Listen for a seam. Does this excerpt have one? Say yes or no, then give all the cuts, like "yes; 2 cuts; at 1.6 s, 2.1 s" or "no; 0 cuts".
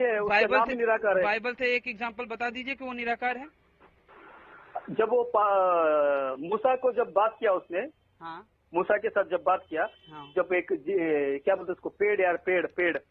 no; 0 cuts